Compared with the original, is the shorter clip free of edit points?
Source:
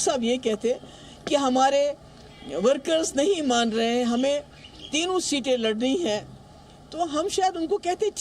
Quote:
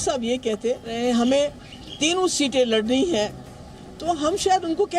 no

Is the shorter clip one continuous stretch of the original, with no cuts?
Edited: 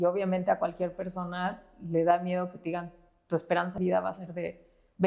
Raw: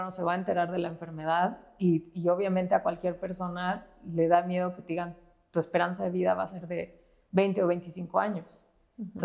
no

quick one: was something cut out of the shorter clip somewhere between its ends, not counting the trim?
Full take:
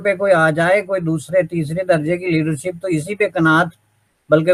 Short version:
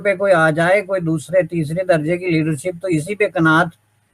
no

